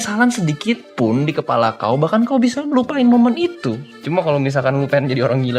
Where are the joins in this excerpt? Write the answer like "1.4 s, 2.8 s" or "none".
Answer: 3.9 s